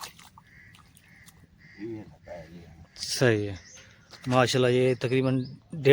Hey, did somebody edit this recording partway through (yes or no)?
no